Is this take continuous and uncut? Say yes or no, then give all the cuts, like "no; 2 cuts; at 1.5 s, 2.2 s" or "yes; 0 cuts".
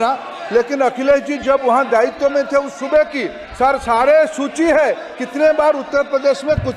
yes; 0 cuts